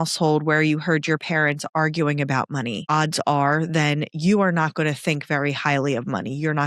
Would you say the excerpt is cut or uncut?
uncut